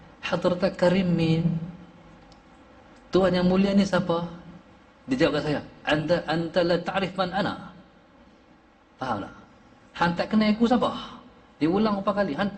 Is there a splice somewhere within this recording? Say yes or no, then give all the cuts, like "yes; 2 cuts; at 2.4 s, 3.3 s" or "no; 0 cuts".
no; 0 cuts